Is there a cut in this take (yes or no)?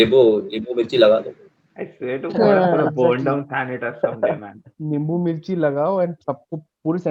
yes